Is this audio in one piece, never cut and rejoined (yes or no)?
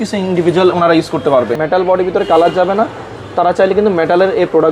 no